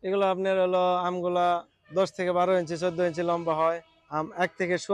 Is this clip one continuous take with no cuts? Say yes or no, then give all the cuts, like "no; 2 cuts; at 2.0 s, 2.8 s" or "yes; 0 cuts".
no; 2 cuts; at 1.8 s, 4.0 s